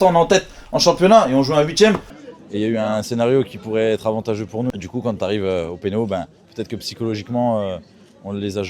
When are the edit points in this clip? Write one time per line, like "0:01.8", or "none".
0:02.1
0:04.7